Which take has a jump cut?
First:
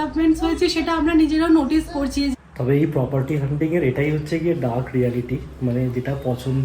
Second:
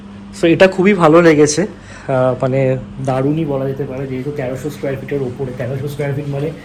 first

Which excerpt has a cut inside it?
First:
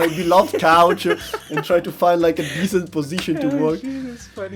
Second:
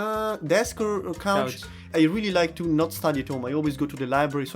second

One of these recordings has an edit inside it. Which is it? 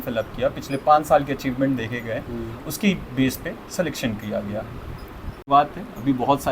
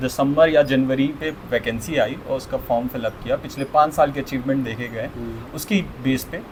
first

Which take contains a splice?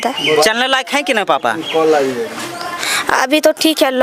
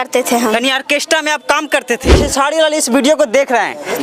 second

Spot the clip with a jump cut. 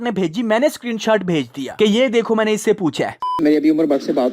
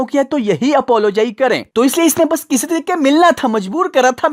first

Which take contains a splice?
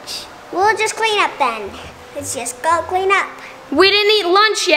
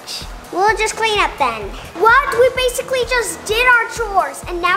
second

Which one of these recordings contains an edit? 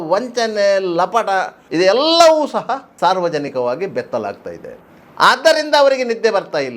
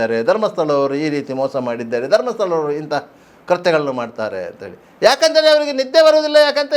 first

